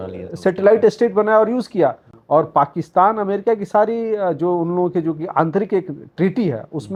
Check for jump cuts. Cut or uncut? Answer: uncut